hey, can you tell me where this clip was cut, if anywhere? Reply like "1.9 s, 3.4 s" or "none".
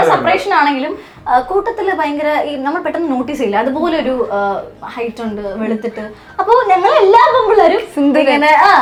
none